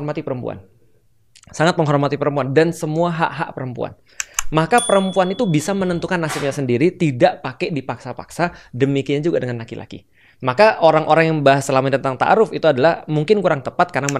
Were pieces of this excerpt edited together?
no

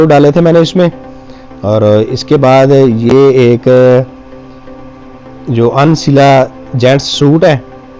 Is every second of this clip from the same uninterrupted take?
yes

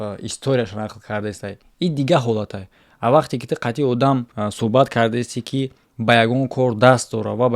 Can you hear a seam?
yes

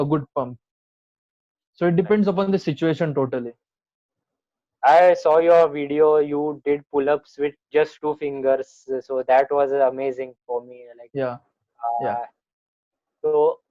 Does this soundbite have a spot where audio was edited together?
no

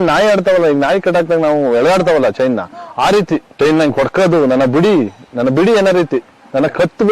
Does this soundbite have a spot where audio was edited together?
no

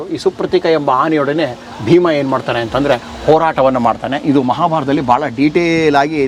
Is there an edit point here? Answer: no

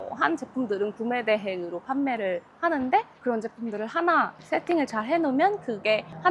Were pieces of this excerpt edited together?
no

